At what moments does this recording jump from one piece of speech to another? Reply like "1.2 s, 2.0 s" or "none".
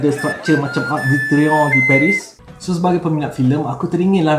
2.4 s